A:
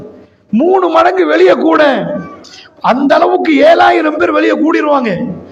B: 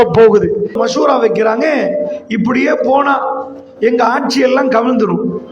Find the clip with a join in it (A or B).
B